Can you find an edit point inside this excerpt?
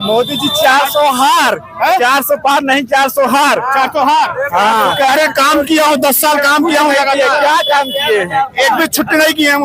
no; 0 cuts

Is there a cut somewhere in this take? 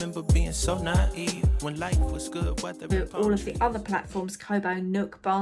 yes; 1 cut; at 2.9 s

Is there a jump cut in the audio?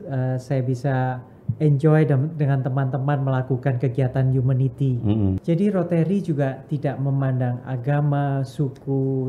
yes; 1 cut; at 5.4 s

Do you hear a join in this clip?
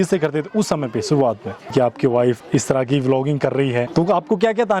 yes; 3 cuts; at 1.7 s, 2.4 s, 3.9 s

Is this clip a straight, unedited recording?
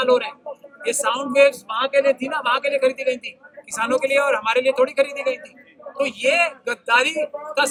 yes; 0 cuts

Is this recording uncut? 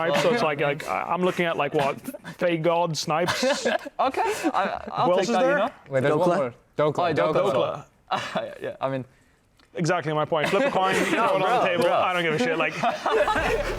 yes; 0 cuts

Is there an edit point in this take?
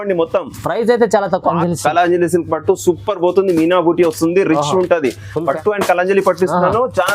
yes; 2 cuts; at 1.5 s, 5.5 s

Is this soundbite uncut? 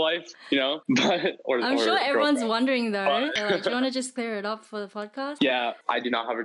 no; 1 cut; at 3.4 s

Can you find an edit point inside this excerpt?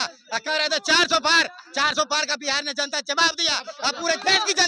no; 0 cuts

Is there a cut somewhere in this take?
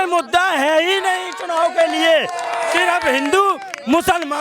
no; 0 cuts

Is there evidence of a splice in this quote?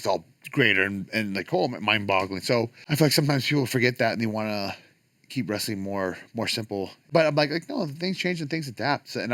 yes; 2 cuts; at 2.8 s, 7.0 s

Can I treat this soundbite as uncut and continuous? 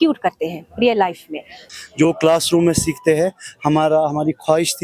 no; 1 cut; at 1.6 s

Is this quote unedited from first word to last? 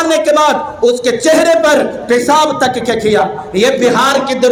yes; 0 cuts

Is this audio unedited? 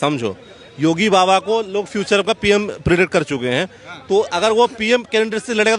yes; 0 cuts

